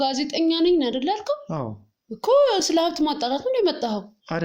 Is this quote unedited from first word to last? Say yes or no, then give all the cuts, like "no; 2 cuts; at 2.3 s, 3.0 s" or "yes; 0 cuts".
yes; 0 cuts